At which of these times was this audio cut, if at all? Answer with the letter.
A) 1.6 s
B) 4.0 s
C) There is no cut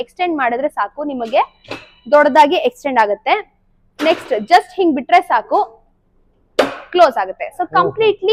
C